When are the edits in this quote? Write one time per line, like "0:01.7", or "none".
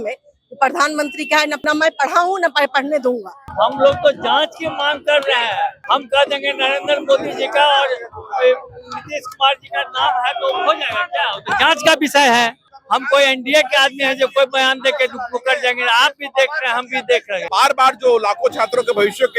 0:01.6
0:03.5
0:05.8
0:12.6
0:17.5